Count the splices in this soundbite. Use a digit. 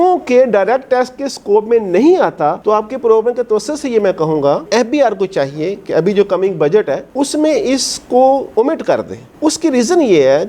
0